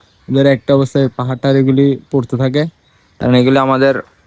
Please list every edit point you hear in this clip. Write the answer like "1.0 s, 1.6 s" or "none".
none